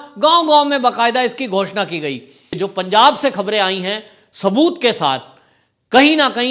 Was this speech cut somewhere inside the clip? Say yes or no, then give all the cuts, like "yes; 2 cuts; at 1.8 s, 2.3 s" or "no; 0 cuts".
yes; 1 cut; at 2.6 s